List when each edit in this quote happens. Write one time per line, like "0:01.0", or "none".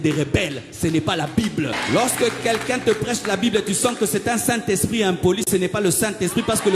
0:01.8